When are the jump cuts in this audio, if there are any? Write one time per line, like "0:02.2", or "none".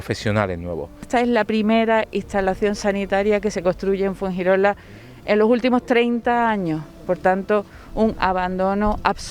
0:01.1